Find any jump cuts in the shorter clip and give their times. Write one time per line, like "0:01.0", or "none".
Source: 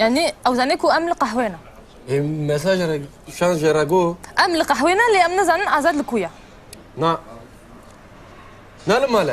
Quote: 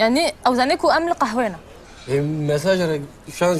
none